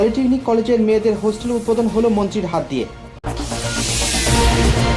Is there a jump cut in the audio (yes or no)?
yes